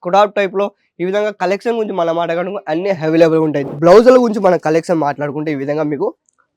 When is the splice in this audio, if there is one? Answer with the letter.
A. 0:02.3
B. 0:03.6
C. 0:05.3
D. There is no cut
B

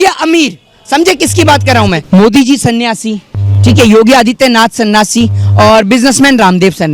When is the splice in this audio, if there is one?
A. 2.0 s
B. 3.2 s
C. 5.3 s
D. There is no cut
A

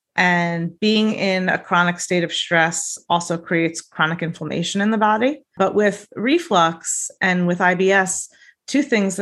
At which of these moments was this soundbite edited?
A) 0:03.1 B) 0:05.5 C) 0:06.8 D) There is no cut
B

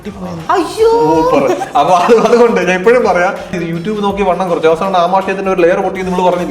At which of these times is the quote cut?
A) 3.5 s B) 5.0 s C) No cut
A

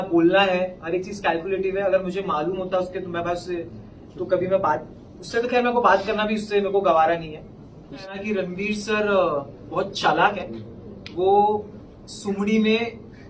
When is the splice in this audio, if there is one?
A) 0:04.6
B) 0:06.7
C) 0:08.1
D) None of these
C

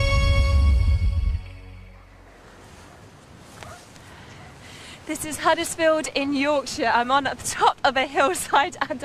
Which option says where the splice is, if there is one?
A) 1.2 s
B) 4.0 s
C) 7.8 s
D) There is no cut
A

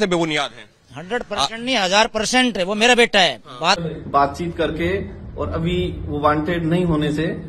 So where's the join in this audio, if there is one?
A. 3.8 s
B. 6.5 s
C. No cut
A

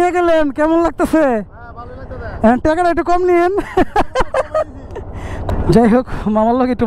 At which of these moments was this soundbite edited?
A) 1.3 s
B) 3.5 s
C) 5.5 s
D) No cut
C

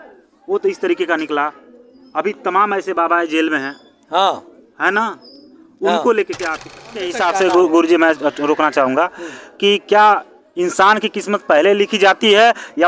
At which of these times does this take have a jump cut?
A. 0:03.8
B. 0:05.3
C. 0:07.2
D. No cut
C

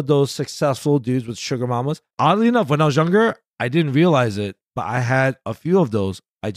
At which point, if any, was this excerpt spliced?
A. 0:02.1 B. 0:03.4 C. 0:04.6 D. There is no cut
A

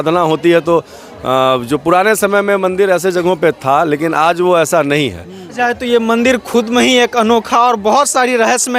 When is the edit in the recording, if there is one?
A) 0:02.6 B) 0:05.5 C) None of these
B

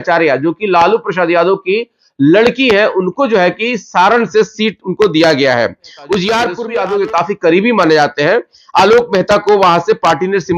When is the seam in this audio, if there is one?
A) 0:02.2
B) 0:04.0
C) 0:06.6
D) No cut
C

